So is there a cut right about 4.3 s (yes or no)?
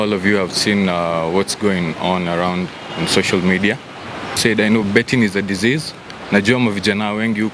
yes